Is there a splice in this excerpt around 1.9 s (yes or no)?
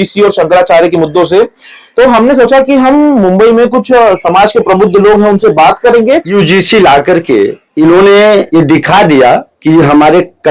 no